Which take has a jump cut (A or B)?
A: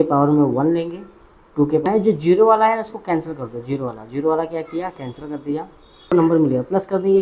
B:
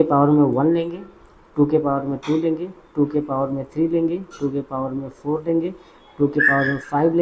A